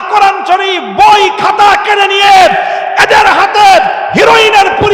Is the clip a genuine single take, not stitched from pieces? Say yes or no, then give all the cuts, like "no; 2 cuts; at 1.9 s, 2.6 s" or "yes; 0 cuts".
yes; 0 cuts